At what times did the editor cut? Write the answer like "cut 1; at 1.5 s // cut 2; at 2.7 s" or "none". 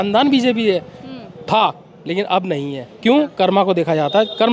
none